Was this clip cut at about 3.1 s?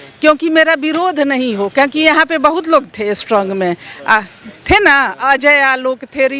no; 0 cuts

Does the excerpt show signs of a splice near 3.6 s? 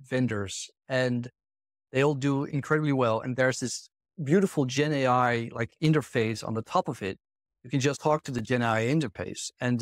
no; 1 cut; at 8.0 s

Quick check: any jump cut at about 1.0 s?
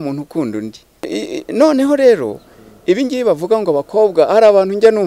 yes; 1 cut; at 1.0 s

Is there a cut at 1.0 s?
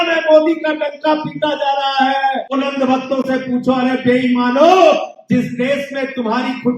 no; 1 cut; at 2.5 s

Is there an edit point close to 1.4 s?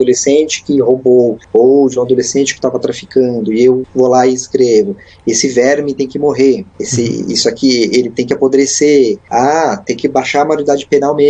yes; 3 cuts; at 1.4 s, 3.9 s, 6.8 s

